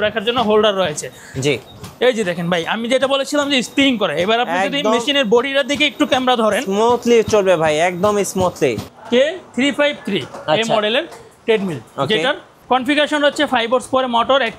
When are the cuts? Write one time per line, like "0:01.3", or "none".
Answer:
0:08.9